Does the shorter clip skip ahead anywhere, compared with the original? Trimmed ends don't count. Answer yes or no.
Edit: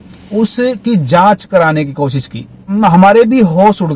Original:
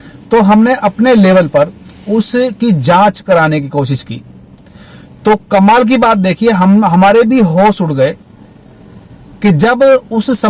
yes